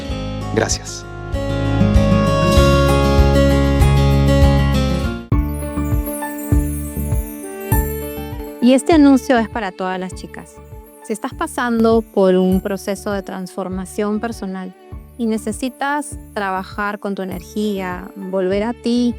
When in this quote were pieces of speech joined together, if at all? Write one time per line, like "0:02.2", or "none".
0:05.0